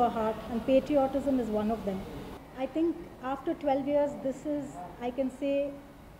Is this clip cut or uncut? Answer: cut